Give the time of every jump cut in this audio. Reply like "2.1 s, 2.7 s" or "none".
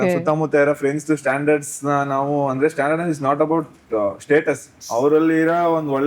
4.8 s